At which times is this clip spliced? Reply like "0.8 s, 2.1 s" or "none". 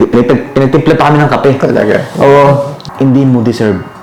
2.8 s